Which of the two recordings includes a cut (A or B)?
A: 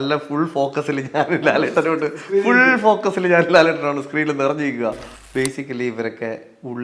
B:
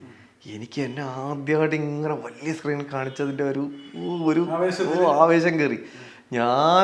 A